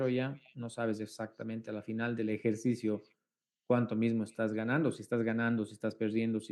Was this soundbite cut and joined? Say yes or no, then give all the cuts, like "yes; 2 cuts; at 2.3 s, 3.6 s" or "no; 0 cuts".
no; 0 cuts